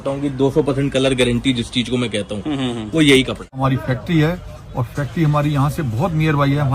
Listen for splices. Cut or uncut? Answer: cut